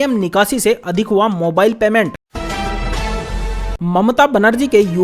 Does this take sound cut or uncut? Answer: cut